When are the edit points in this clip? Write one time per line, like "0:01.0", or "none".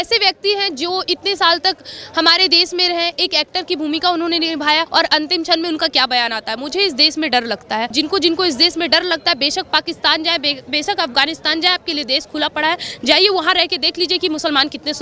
0:04.9
0:07.9